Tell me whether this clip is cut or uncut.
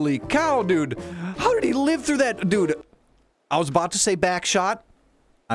uncut